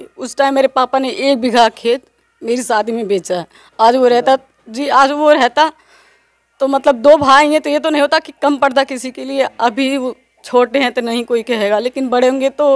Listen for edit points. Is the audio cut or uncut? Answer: uncut